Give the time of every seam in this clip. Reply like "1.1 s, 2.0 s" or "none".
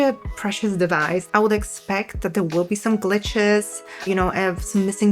1.3 s

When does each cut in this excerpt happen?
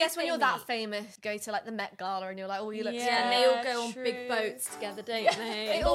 1.1 s

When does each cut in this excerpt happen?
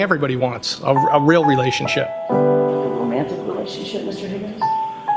none

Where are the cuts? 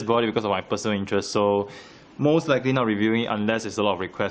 none

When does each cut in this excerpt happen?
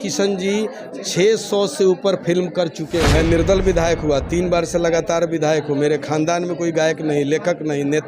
3.1 s

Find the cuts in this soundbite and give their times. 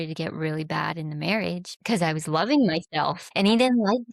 1.9 s, 3.2 s

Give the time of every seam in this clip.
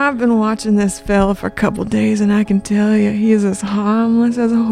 none

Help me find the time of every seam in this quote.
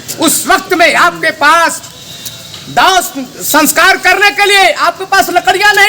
none

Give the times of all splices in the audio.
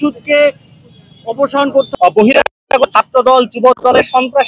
1.9 s

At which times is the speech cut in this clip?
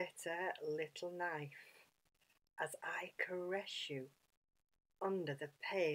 none

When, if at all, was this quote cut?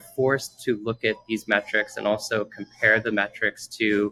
none

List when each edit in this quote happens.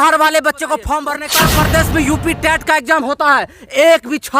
1.2 s

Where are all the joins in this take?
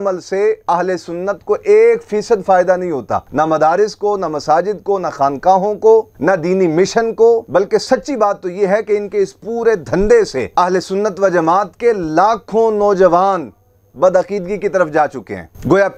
none

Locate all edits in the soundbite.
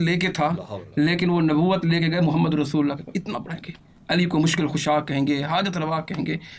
none

